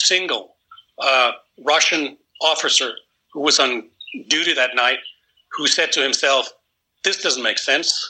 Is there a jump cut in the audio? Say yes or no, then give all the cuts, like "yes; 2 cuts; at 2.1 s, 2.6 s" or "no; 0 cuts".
no; 0 cuts